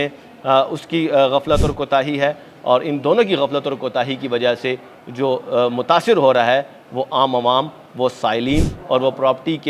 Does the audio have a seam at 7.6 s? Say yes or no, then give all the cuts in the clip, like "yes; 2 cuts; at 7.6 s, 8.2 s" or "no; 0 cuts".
no; 0 cuts